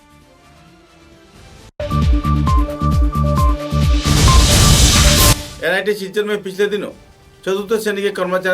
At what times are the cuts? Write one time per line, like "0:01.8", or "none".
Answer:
0:05.5